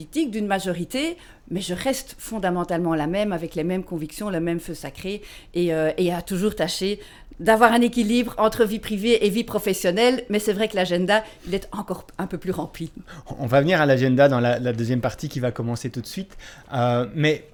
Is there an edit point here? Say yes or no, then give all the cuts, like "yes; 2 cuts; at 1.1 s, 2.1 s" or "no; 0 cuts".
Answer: no; 0 cuts